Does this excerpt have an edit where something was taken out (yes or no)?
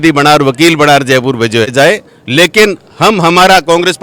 yes